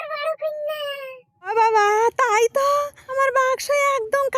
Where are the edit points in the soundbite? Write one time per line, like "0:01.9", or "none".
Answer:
0:01.2
0:03.0